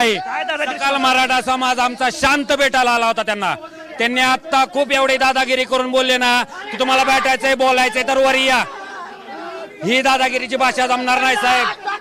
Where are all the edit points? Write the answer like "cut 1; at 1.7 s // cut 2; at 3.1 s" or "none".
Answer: none

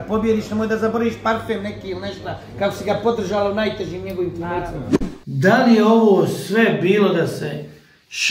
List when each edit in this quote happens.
cut 1; at 5.0 s

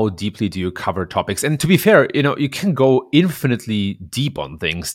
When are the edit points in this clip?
cut 1; at 1.6 s

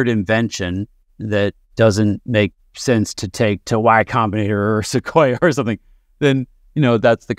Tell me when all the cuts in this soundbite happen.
none

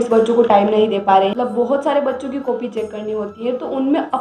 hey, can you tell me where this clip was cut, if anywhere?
cut 1; at 1.3 s

